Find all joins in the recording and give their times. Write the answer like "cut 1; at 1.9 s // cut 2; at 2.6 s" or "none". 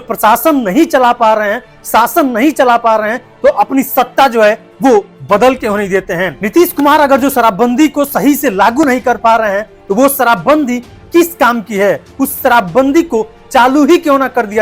none